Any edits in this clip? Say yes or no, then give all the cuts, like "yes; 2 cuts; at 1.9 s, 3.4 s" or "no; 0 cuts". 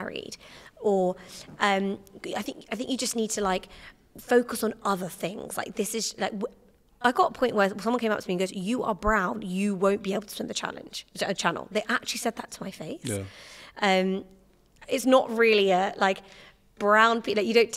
no; 0 cuts